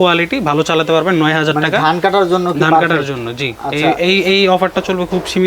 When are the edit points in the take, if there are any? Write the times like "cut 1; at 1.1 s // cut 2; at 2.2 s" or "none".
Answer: none